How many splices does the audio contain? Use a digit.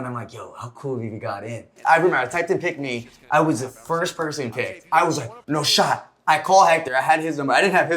2